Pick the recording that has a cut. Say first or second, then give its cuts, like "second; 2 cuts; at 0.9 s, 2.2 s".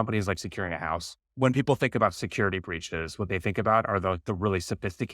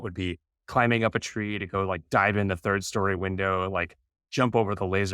first; 1 cut; at 1.3 s